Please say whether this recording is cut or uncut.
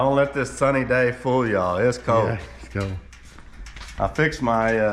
uncut